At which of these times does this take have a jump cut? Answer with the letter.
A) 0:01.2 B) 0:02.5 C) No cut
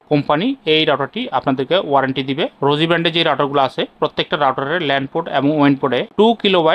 B